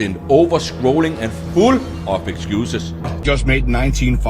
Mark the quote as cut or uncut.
cut